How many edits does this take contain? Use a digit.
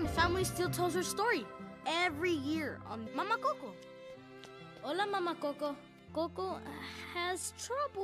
1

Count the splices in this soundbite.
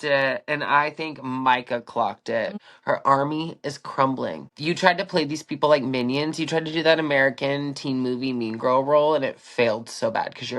2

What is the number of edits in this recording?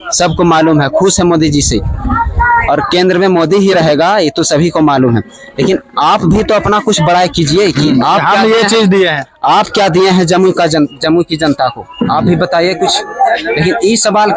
0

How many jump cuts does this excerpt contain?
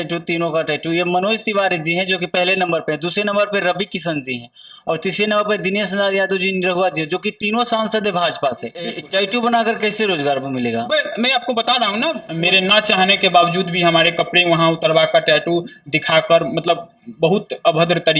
2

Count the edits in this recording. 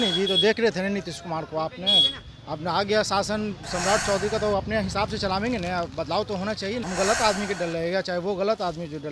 1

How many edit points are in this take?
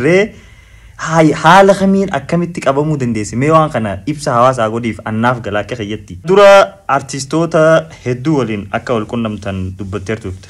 1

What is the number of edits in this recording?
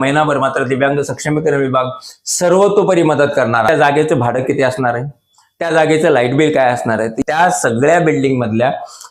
2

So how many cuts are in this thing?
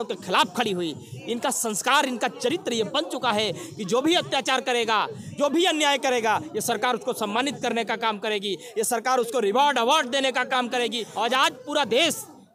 1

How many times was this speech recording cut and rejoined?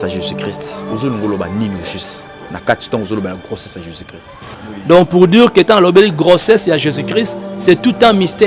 1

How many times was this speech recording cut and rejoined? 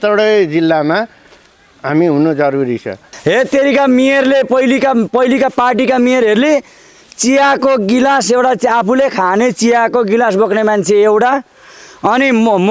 1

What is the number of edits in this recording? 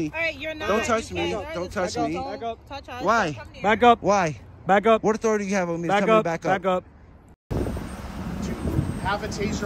1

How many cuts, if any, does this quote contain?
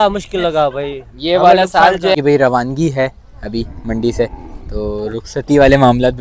1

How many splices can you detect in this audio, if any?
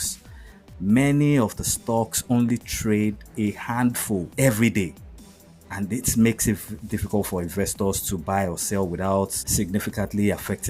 2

